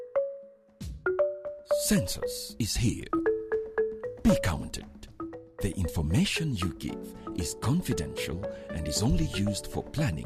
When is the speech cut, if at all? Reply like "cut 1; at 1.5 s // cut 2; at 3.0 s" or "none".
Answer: none